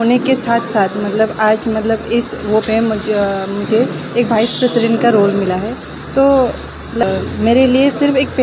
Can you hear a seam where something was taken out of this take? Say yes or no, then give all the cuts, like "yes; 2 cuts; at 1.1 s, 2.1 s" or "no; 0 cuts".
no; 0 cuts